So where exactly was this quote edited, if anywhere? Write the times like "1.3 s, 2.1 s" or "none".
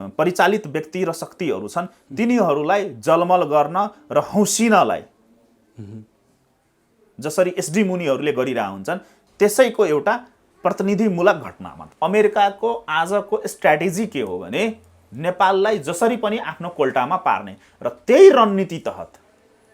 11.8 s

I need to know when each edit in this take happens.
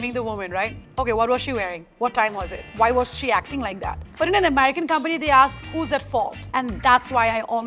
none

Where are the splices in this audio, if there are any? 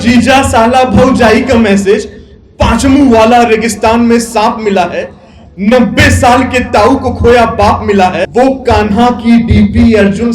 8.3 s

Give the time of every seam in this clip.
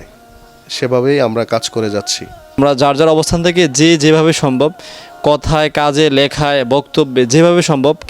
2.6 s

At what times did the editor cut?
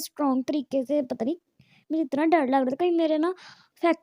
none

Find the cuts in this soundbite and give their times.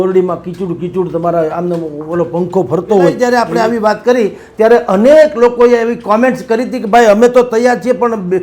3.2 s

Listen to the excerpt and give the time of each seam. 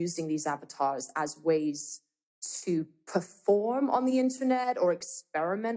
none

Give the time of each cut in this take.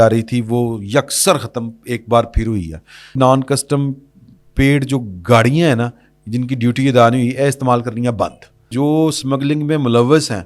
3.1 s, 8.7 s

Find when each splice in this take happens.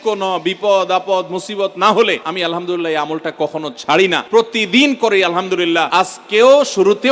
2.3 s, 4.2 s, 5.9 s

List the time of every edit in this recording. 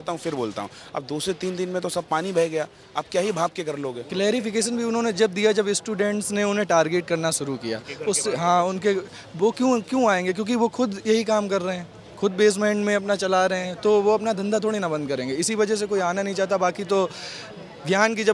4.0 s

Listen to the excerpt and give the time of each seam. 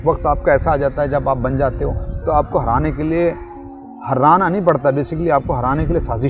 none

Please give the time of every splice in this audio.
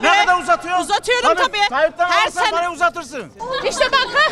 3.3 s

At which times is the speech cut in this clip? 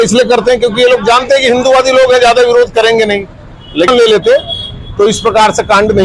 3.9 s

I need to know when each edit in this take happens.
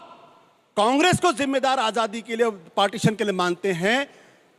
none

